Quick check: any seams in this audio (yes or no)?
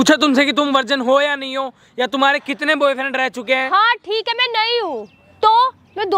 no